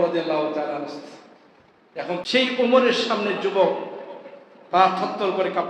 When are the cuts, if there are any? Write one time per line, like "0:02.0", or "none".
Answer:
0:02.2